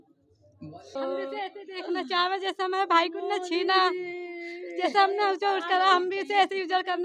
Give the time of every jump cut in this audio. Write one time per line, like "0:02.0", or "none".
0:01.0